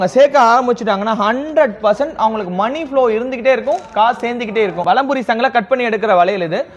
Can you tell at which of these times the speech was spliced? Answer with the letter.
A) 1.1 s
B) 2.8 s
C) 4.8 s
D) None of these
C